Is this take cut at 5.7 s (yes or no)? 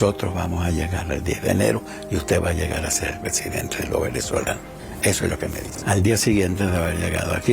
yes